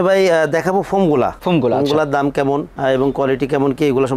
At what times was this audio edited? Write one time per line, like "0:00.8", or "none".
none